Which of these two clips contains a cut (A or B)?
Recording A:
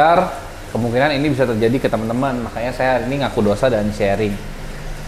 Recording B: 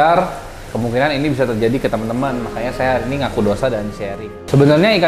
B